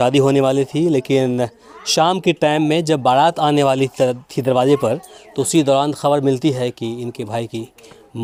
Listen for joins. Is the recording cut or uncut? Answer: uncut